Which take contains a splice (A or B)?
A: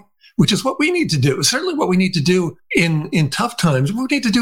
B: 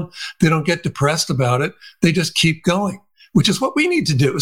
A